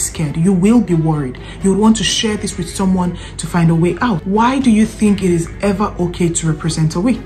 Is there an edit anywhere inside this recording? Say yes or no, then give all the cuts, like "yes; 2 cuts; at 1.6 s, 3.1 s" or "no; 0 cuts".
yes; 1 cut; at 4.2 s